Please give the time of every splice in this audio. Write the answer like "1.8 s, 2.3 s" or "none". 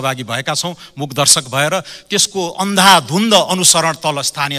none